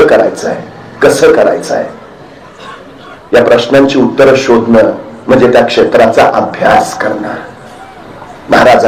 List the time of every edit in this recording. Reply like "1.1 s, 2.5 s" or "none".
none